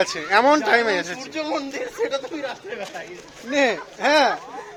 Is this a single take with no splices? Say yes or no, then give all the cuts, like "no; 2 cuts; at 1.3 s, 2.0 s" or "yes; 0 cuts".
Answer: yes; 0 cuts